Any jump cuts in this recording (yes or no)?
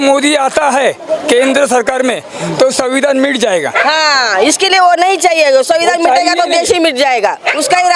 no